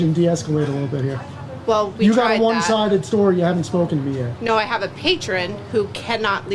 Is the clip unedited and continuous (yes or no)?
no